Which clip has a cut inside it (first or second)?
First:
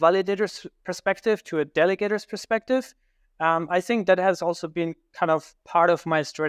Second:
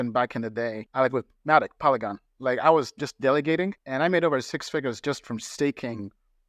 second